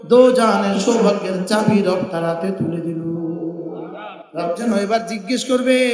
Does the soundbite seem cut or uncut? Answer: cut